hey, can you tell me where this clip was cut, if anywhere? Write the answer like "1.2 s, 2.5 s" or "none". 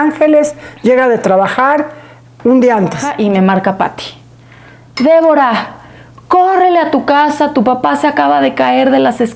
3.1 s